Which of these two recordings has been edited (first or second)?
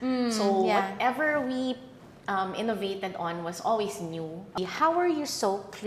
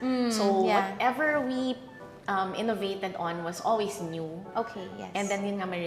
first